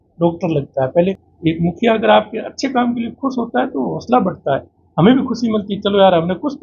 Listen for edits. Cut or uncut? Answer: cut